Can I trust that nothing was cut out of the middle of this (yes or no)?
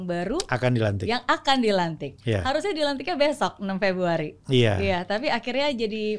yes